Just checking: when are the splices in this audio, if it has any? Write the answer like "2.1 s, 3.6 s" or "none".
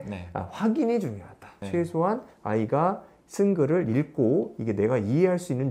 1.6 s